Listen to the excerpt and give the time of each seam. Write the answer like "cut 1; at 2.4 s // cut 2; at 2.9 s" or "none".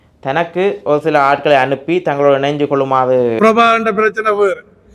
cut 1; at 3.4 s